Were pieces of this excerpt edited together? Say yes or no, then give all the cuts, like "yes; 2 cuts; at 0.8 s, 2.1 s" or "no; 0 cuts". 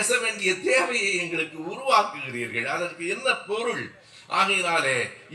no; 0 cuts